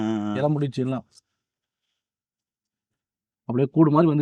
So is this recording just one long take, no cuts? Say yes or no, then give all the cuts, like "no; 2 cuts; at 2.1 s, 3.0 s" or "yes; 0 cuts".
yes; 0 cuts